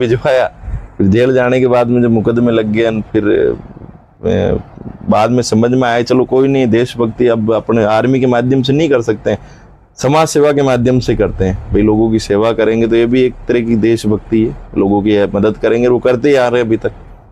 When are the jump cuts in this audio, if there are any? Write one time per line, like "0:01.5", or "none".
none